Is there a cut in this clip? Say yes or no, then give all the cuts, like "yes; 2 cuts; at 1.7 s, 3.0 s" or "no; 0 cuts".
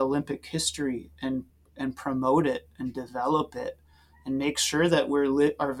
no; 0 cuts